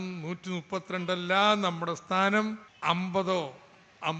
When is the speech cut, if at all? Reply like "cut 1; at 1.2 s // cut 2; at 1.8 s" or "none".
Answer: cut 1; at 2.7 s